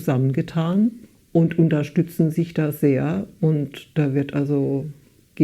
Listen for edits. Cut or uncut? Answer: cut